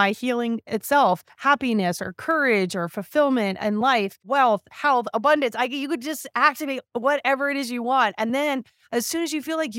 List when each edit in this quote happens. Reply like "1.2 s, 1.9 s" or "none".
1.3 s